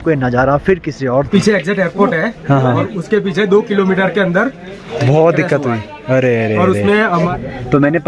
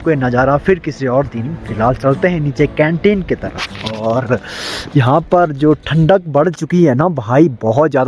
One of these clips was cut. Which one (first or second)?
first